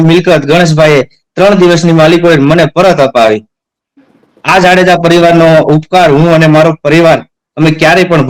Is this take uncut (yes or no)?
yes